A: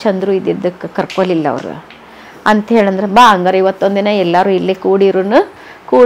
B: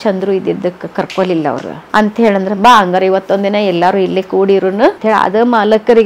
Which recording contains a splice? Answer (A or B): B